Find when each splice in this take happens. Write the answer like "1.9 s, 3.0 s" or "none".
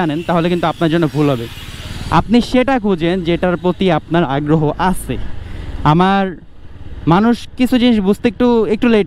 none